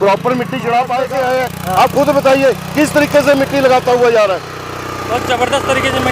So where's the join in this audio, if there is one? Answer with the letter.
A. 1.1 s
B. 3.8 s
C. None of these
A